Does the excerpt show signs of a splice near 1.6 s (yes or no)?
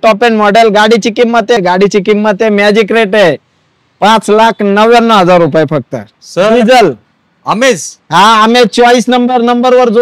yes